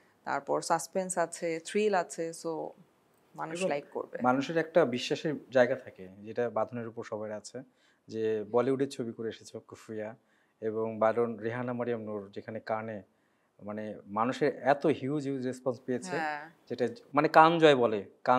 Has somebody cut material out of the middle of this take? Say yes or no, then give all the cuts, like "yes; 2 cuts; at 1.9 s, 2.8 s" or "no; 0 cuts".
no; 0 cuts